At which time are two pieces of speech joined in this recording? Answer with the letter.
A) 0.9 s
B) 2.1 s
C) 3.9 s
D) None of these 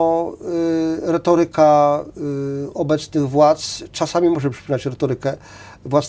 D